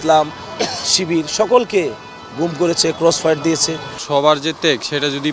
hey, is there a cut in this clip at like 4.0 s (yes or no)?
yes